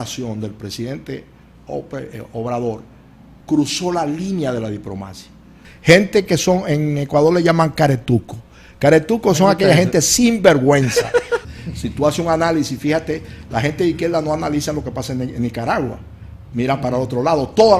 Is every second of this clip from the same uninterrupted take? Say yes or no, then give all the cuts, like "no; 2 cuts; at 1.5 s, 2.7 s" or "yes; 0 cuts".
no; 2 cuts; at 5.7 s, 11.4 s